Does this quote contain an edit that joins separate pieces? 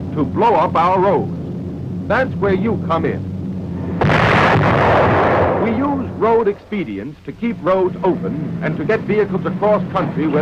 yes; 1 cut; at 9.4 s

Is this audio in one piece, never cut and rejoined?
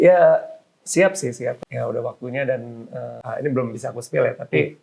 no; 2 cuts; at 1.6 s, 3.2 s

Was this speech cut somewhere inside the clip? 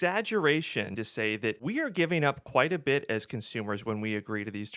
yes; 1 cut; at 1.1 s

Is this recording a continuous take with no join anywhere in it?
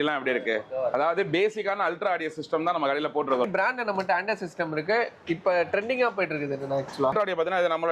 no; 2 cuts; at 3.4 s, 6.9 s

